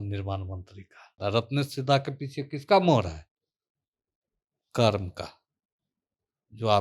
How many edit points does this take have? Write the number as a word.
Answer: one